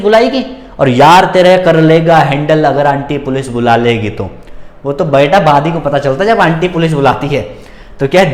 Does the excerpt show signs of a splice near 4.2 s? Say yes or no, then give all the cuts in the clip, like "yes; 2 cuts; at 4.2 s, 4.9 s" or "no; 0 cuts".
no; 0 cuts